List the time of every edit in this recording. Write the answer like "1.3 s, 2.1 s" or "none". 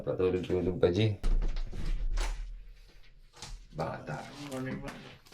1.2 s